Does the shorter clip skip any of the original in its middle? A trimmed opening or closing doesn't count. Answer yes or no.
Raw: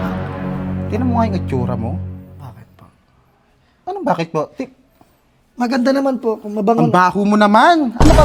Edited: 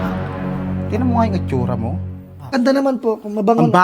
yes